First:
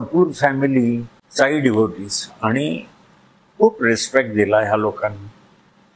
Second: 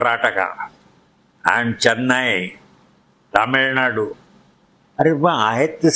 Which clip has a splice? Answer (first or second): first